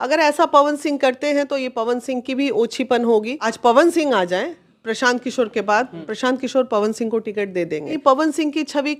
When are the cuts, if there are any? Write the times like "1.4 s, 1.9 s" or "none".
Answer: 3.4 s, 6.0 s, 8.0 s